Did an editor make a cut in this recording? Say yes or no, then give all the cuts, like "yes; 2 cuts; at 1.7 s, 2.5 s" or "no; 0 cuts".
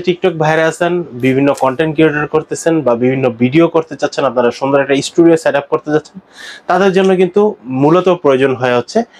no; 0 cuts